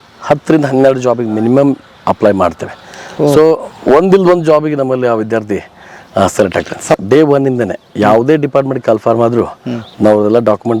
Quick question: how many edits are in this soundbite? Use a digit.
1